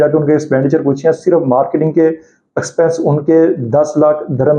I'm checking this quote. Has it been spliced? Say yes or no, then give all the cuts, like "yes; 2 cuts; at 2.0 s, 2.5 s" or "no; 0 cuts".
no; 0 cuts